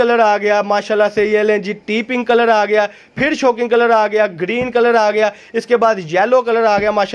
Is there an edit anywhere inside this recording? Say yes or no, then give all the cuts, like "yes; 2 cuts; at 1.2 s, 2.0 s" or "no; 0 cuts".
no; 0 cuts